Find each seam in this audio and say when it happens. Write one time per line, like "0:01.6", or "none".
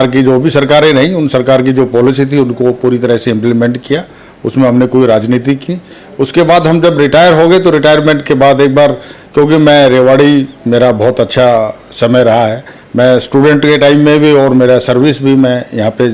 none